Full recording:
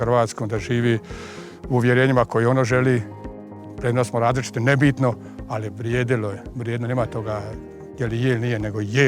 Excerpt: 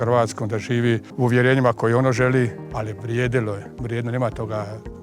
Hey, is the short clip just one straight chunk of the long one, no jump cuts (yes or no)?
no